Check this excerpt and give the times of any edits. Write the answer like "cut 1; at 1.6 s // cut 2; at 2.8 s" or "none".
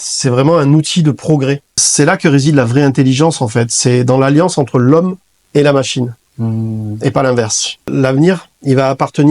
cut 1; at 1.8 s // cut 2; at 7.9 s